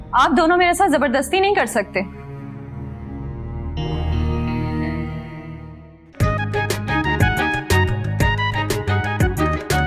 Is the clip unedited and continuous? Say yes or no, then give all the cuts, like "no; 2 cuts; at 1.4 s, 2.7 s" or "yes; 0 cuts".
yes; 0 cuts